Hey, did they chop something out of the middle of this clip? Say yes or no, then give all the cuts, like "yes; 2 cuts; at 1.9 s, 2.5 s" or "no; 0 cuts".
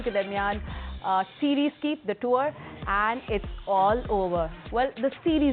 no; 0 cuts